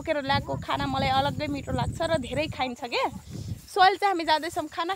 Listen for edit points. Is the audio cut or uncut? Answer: uncut